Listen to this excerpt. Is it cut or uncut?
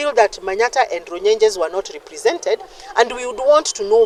uncut